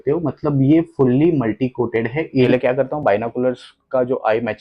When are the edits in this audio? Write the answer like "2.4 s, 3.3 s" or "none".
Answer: 2.4 s